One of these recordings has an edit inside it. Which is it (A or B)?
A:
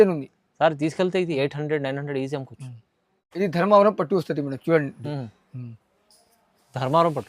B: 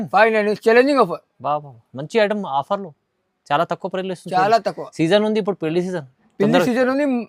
A